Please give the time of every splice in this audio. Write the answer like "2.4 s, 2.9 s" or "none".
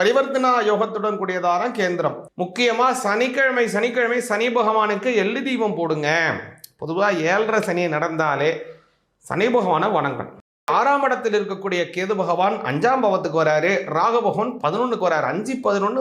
2.2 s, 10.7 s